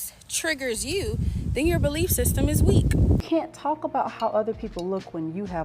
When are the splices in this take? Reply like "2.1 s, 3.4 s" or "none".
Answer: 3.2 s